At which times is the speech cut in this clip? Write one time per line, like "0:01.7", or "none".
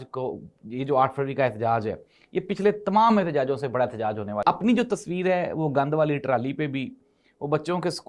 0:04.4